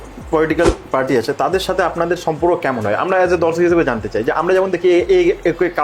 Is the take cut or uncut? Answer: uncut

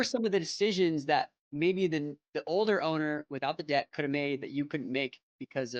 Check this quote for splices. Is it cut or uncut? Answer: uncut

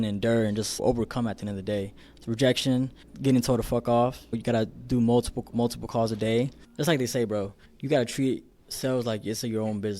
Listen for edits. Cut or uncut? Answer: cut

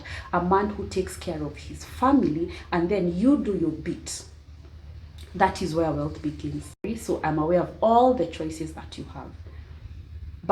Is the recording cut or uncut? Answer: cut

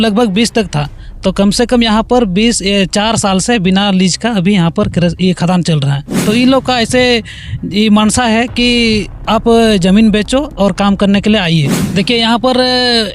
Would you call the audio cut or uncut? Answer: cut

